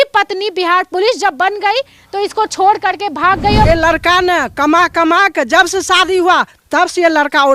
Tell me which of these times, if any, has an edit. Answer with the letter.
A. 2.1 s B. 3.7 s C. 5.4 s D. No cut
B